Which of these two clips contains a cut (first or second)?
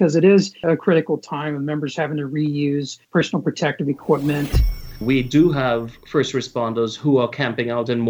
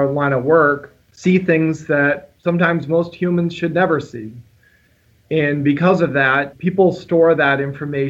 first